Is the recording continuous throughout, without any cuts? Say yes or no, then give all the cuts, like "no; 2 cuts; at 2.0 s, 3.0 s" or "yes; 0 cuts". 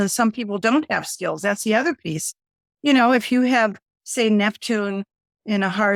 yes; 0 cuts